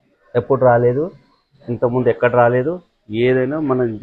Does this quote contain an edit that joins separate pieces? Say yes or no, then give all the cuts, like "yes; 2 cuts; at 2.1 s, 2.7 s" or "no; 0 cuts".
no; 0 cuts